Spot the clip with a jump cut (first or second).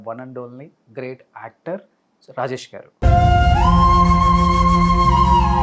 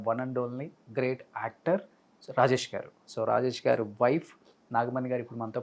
second